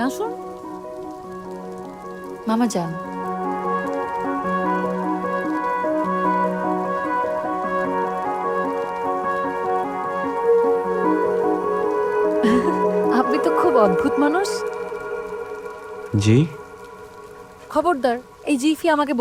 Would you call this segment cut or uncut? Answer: uncut